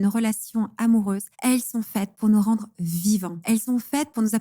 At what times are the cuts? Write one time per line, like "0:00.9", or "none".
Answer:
0:01.3
0:03.3